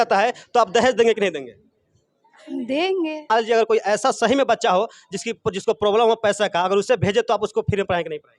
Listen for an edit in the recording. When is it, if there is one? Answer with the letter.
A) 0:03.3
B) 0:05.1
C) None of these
A